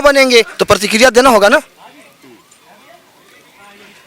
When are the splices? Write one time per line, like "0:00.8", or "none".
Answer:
none